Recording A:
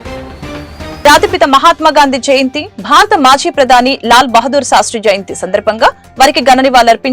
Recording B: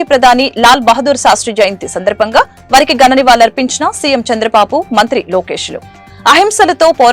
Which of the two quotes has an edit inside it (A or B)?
A